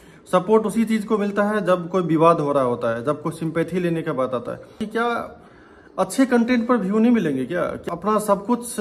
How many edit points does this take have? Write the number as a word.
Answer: two